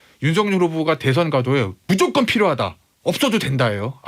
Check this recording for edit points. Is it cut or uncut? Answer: cut